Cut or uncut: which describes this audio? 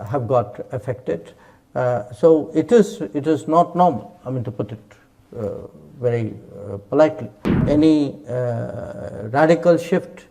cut